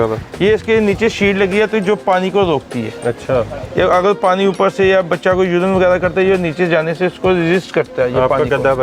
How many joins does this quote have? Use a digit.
0